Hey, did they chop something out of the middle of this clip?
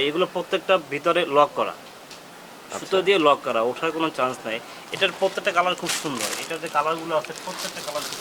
no; 0 cuts

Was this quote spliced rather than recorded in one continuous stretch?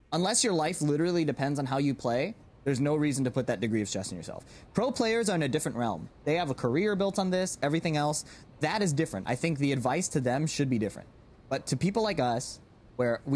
no; 0 cuts

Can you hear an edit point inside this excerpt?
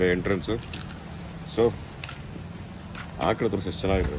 no; 0 cuts

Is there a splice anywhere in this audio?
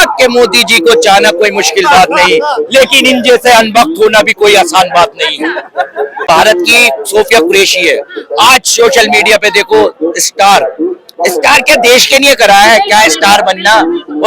yes; 1 cut; at 6.2 s

